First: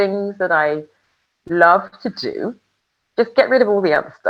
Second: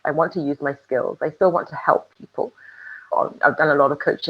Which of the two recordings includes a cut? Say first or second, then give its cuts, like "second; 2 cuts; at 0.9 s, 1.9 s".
second; 1 cut; at 3.0 s